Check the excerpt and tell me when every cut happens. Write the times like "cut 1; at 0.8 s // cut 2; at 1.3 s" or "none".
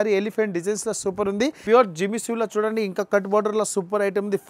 cut 1; at 1.6 s